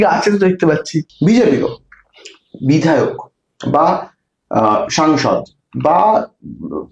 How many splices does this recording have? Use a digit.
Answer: 1